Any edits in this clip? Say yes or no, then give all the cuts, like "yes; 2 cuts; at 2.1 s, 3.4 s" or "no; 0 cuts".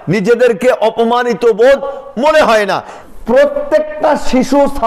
yes; 1 cut; at 2.9 s